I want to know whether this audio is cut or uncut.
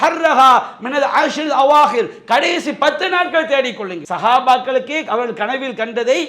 cut